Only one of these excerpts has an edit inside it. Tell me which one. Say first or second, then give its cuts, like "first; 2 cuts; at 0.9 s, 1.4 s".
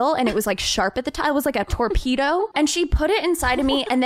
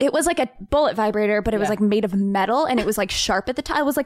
first; 1 cut; at 2.5 s